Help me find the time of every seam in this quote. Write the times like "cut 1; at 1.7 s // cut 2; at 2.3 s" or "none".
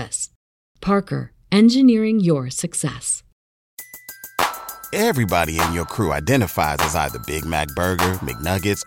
cut 1; at 3.6 s